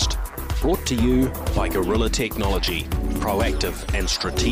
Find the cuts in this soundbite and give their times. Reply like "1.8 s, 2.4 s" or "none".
none